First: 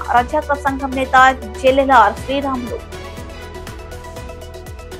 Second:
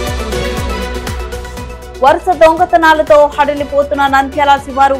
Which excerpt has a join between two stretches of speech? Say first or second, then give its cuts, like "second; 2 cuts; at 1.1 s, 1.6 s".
second; 1 cut; at 1.0 s